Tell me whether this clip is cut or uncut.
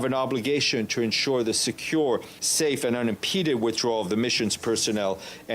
cut